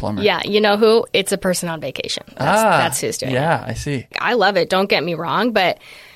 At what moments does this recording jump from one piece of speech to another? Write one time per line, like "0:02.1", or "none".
0:04.1